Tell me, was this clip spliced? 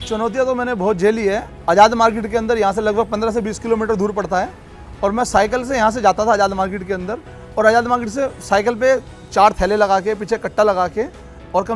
no; 0 cuts

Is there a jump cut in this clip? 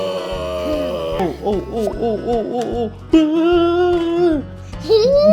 yes; 1 cut; at 1.2 s

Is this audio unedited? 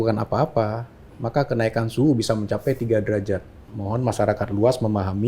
no; 1 cut; at 3.6 s

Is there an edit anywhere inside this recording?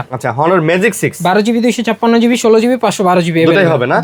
no; 0 cuts

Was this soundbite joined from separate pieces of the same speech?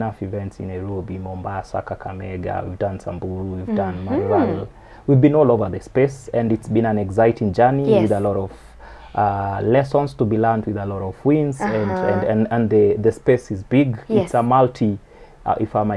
no; 0 cuts

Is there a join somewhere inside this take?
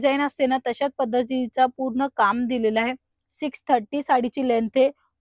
no; 0 cuts

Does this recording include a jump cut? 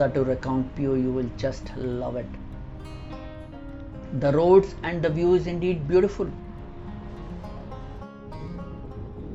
no; 0 cuts

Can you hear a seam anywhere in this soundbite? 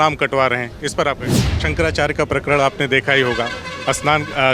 yes; 1 cut; at 1.6 s

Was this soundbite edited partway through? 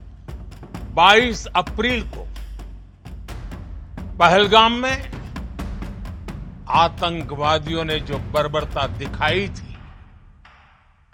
no; 0 cuts

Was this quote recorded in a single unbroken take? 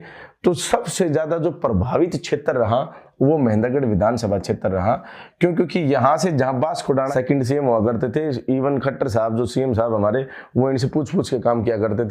no; 1 cut; at 7.1 s

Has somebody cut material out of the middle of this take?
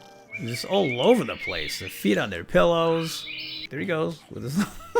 yes; 1 cut; at 3.7 s

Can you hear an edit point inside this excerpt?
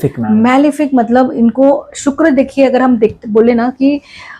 no; 0 cuts

